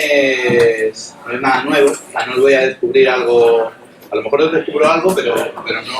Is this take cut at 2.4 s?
yes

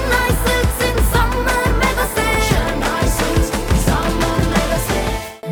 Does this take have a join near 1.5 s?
no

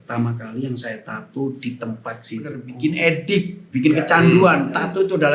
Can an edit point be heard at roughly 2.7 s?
yes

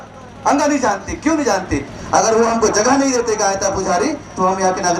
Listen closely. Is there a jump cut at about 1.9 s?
yes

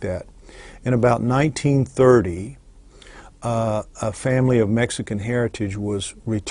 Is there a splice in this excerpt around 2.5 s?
no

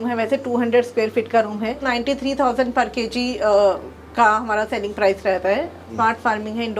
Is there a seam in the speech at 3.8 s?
no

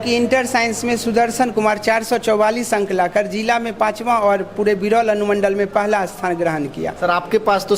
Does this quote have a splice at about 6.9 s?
yes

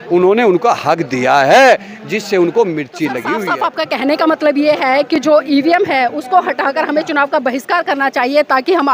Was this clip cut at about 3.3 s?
yes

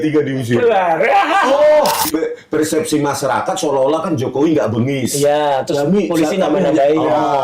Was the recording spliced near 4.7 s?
no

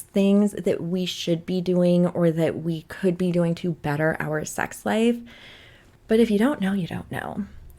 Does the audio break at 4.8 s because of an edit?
no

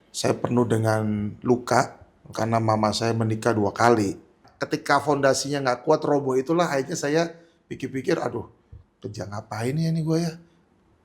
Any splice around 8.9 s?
no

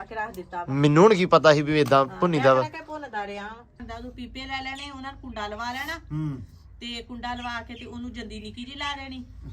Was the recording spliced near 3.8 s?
yes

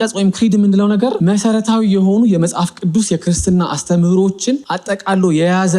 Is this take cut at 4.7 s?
yes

